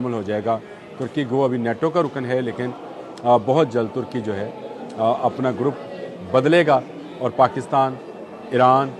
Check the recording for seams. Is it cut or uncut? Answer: uncut